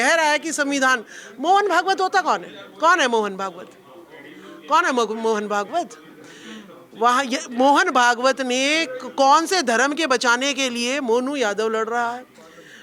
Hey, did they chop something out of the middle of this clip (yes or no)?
no